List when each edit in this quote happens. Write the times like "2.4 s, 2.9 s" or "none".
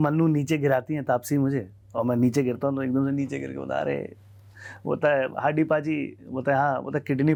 none